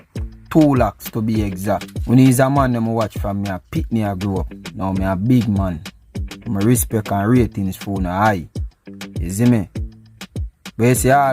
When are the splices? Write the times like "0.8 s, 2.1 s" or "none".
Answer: 1.9 s